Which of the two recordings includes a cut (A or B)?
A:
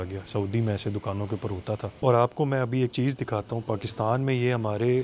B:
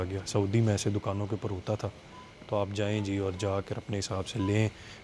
A